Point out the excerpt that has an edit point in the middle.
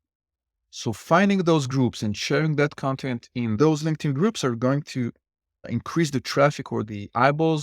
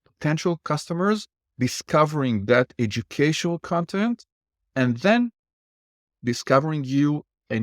first; 3 cuts; at 3.5 s, 5.6 s, 6.9 s

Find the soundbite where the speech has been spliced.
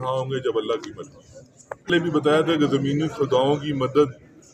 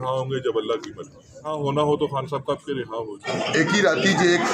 second; 2 cuts; at 1.5 s, 3.2 s

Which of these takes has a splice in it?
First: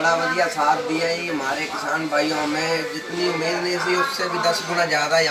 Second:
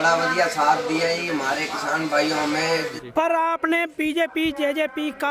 second; 1 cut; at 3.0 s

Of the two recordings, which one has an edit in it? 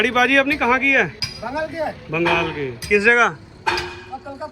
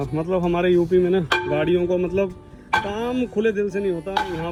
first; 1 cut; at 1.3 s

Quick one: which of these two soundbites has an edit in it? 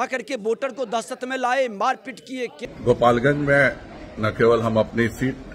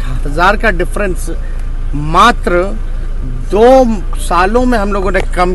first; 1 cut; at 2.5 s

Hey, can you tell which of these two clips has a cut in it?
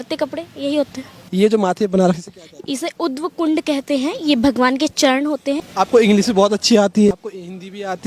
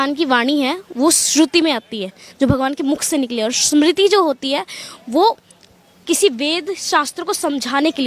first; 3 cuts; at 1.2 s, 5.6 s, 7.1 s

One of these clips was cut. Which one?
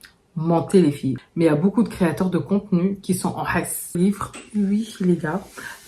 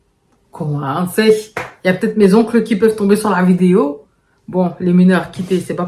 first; 2 cuts; at 1.2 s, 4.0 s

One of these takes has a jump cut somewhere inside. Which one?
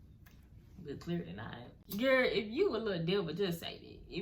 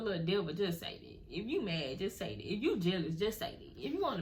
first; 1 cut; at 1.7 s

